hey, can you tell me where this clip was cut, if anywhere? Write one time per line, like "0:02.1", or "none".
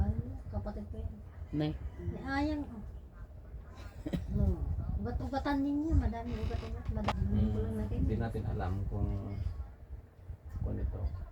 0:07.1